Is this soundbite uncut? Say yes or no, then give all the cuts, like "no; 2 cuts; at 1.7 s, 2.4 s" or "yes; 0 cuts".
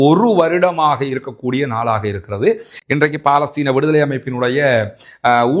yes; 0 cuts